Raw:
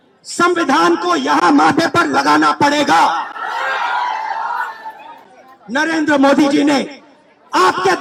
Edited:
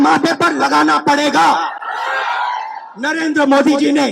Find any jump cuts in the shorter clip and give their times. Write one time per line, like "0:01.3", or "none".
0:02.8